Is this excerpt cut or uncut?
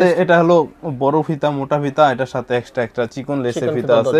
uncut